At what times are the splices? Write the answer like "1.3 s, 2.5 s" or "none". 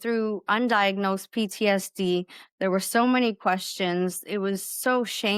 none